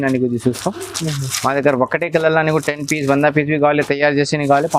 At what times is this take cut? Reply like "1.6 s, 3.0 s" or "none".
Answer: none